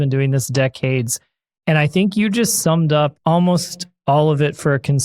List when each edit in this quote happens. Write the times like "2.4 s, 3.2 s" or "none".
3.2 s